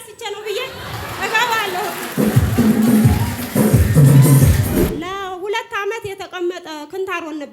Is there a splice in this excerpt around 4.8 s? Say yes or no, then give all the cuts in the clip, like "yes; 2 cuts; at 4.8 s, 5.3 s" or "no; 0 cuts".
yes; 1 cut; at 4.8 s